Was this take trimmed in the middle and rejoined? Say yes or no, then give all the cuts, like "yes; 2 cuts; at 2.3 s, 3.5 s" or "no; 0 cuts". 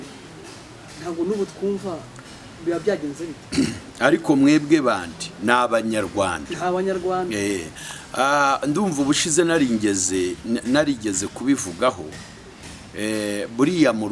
no; 0 cuts